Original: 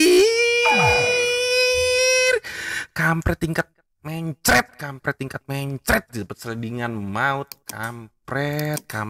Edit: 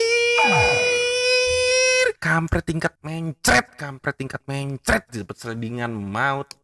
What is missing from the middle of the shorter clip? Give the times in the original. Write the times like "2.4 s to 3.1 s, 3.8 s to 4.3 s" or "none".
2.5 s to 2.9 s, 3.8 s to 4.0 s